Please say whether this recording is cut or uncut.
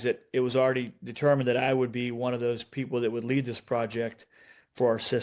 uncut